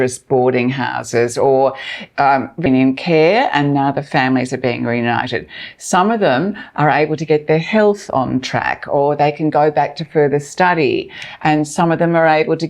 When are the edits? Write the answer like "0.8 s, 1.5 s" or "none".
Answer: 2.6 s